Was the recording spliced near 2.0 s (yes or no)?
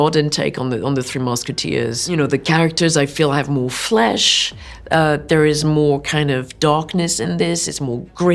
yes